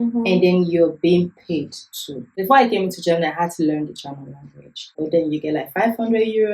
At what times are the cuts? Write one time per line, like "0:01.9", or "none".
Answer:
0:02.2
0:05.0

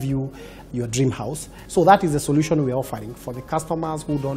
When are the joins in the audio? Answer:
0:01.5

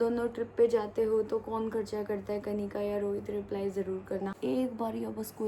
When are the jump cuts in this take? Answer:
0:04.4

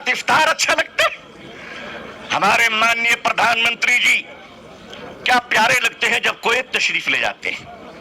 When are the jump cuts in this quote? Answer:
none

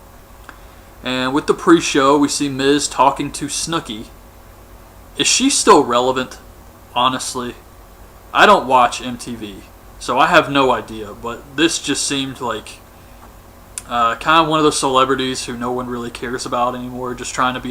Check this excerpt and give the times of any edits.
none

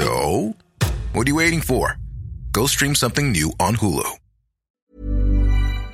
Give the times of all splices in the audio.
0:04.9

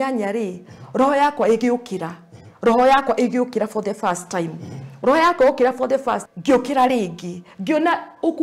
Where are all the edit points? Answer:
0:06.2

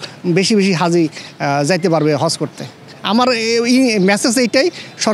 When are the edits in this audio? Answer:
none

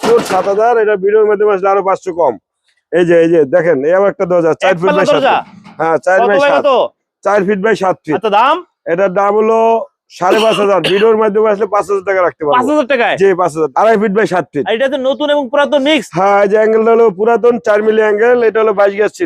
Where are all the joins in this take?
0:13.7

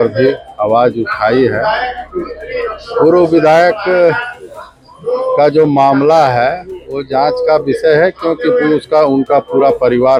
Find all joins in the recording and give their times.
none

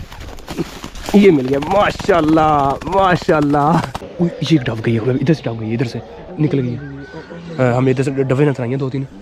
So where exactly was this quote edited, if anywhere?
0:04.0

